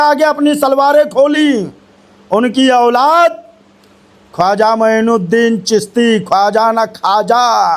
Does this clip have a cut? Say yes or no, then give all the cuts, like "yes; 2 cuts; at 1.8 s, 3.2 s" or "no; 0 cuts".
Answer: no; 0 cuts